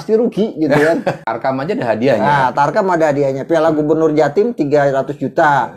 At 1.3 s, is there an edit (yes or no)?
yes